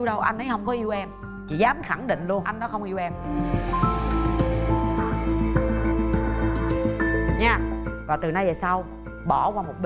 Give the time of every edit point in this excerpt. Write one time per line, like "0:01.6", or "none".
none